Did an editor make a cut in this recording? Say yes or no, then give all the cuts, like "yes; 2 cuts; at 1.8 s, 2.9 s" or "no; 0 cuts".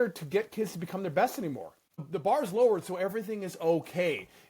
yes; 1 cut; at 2.0 s